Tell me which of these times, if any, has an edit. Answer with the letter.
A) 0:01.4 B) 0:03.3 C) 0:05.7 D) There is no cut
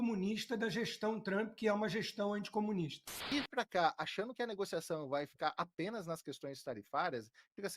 B